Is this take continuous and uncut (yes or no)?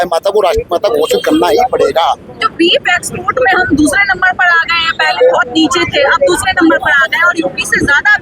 yes